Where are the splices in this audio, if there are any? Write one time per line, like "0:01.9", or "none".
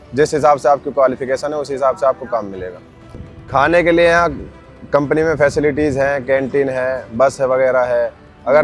0:03.1